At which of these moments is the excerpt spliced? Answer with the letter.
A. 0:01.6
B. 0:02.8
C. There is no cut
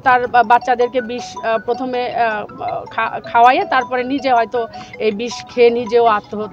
C